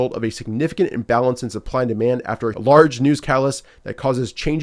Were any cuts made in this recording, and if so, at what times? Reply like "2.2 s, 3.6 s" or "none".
2.6 s

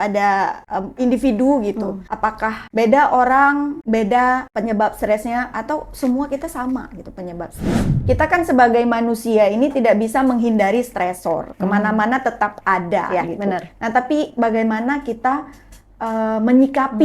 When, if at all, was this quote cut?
1.0 s, 2.3 s, 3.8 s, 4.5 s, 7.9 s

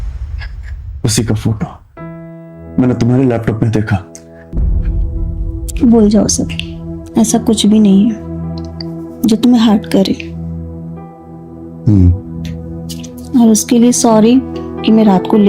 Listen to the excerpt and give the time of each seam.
4.5 s

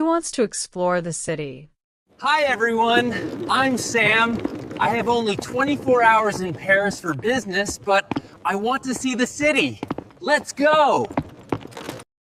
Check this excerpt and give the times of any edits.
none

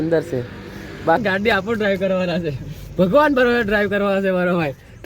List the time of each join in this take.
1.2 s

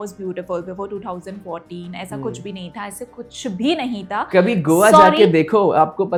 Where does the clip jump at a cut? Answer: none

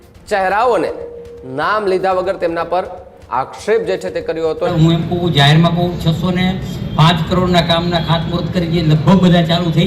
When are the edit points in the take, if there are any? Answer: 4.7 s

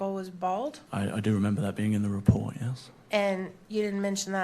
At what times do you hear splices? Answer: 0.8 s, 1.7 s

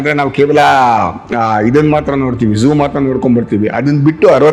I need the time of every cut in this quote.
none

